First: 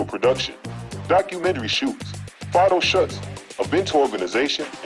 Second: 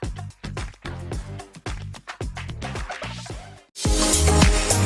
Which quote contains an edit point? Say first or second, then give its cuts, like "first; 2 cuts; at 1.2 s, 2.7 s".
second; 1 cut; at 3.9 s